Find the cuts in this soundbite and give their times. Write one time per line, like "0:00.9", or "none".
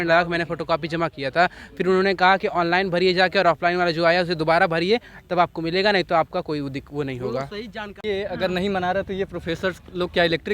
0:08.0